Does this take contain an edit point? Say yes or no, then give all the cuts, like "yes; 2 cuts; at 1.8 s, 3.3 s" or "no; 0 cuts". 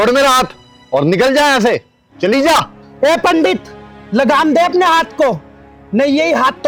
no; 0 cuts